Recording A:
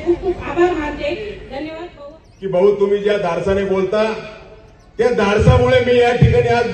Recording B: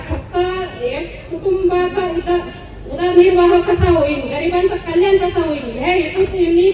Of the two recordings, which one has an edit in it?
A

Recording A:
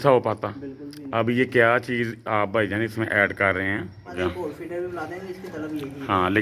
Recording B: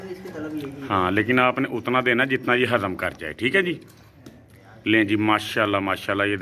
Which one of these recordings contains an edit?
A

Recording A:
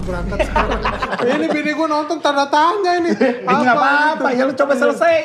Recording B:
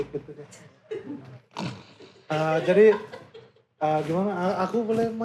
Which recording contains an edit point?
A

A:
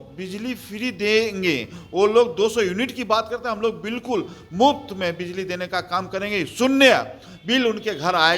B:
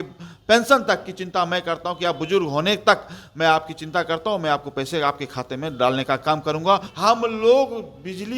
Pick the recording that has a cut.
B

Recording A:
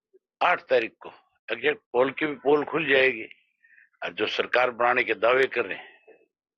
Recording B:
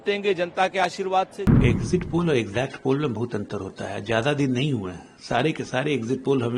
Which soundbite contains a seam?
B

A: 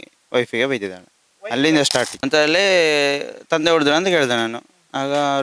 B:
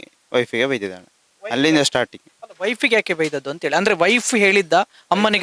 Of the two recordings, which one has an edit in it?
A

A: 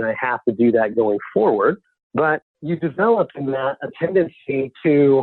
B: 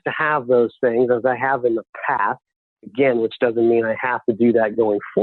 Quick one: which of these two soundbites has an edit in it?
A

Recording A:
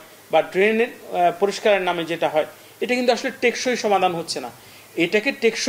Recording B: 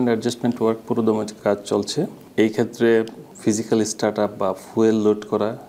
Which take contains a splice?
B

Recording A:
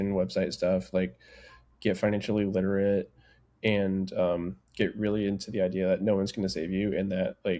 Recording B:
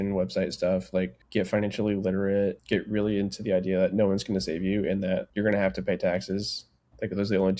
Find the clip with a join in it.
B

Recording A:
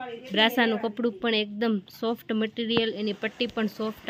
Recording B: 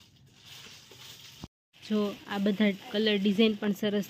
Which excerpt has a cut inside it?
B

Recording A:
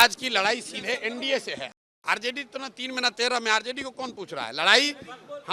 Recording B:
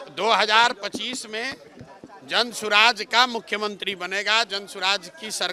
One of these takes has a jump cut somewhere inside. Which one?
A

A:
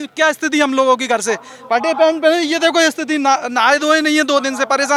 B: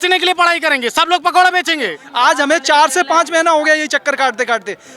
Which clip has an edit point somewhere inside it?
B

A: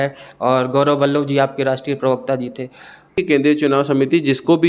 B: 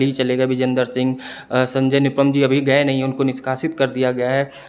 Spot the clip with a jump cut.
A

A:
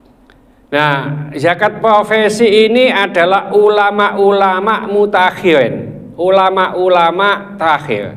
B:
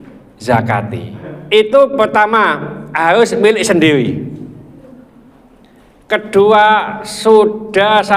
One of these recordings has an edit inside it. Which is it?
B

